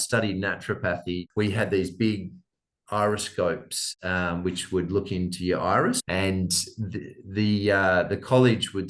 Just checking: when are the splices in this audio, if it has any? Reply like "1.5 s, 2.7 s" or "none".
1.3 s, 6.0 s